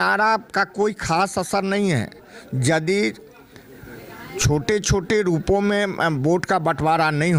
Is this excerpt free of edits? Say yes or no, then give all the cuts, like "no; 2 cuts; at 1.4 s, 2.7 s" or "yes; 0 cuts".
yes; 0 cuts